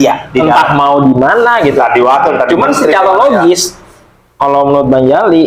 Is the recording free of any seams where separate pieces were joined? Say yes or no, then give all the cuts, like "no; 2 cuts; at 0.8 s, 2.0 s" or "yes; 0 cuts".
yes; 0 cuts